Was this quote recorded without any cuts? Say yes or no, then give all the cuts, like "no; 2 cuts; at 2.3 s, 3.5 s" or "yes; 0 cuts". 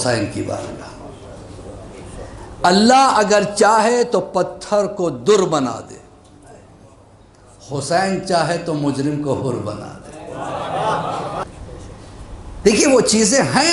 no; 1 cut; at 11.4 s